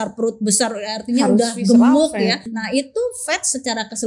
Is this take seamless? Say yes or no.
no